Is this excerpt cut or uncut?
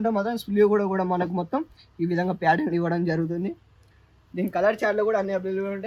uncut